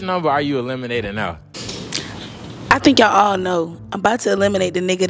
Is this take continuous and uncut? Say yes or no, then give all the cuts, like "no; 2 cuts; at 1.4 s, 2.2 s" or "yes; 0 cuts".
yes; 0 cuts